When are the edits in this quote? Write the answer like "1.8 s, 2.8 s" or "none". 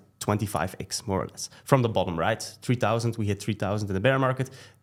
none